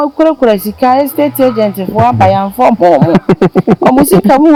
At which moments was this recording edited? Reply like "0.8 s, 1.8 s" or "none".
none